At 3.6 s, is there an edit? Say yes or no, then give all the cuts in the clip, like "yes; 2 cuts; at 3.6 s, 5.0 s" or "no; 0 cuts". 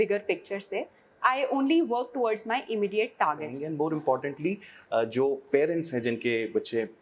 yes; 1 cut; at 3.6 s